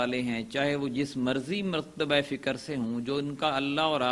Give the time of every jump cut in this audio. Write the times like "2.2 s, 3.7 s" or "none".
none